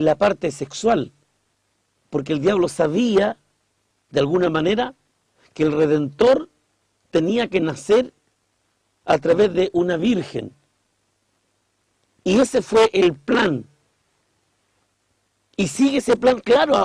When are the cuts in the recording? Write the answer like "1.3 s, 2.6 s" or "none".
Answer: 7.8 s